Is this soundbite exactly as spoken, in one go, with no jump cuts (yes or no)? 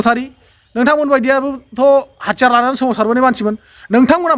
yes